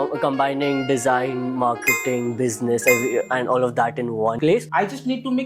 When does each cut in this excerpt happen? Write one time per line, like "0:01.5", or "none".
0:04.4